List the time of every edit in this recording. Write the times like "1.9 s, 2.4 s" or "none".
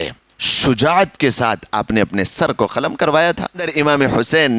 3.7 s